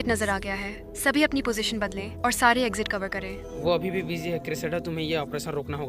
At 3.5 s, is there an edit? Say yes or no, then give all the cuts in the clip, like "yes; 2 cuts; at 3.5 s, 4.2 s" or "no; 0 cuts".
yes; 1 cut; at 3.5 s